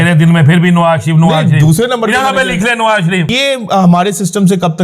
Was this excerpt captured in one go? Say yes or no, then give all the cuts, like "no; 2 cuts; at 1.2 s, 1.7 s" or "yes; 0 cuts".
no; 1 cut; at 3.3 s